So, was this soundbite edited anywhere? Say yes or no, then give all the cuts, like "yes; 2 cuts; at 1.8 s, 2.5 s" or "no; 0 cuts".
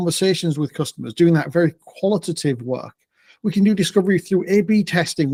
no; 0 cuts